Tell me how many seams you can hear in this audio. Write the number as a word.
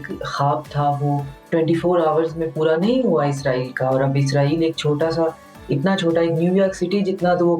zero